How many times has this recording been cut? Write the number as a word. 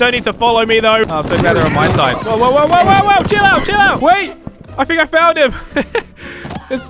one